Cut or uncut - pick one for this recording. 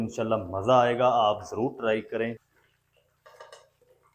cut